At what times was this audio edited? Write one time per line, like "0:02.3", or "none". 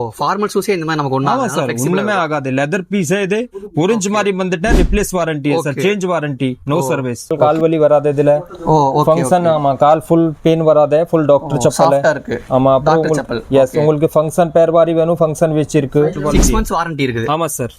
0:07.3
0:16.2